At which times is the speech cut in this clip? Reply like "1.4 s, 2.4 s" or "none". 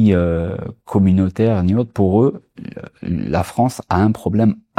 none